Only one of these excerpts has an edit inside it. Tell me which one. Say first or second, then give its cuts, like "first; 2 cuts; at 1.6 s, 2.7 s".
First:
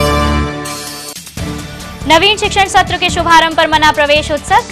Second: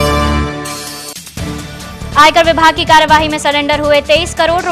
first; 1 cut; at 1.6 s